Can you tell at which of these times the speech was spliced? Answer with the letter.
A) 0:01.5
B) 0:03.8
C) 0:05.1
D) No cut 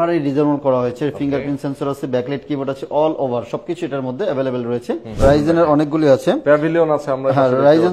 C